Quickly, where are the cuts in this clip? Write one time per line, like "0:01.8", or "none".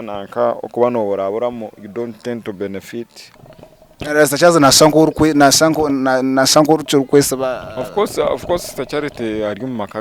0:03.3